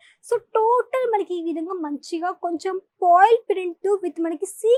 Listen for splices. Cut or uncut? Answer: uncut